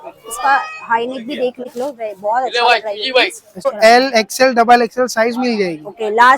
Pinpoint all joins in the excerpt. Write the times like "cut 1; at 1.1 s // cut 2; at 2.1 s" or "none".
cut 1; at 1.6 s // cut 2; at 3.7 s